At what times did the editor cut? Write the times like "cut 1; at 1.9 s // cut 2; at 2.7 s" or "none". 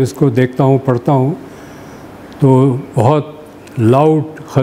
none